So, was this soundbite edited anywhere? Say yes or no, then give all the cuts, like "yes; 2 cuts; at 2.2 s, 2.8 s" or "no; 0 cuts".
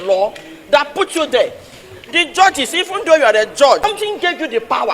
yes; 1 cut; at 3.8 s